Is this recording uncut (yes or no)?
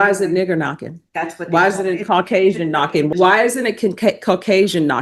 no